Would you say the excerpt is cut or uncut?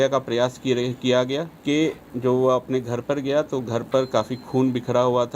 cut